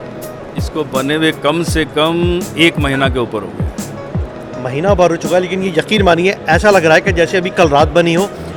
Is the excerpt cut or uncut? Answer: uncut